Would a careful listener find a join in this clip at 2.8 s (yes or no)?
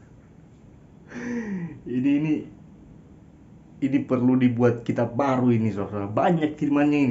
no